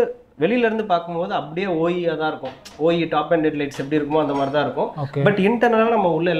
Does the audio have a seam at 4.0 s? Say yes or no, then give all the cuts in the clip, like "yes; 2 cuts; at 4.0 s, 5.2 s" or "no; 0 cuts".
no; 0 cuts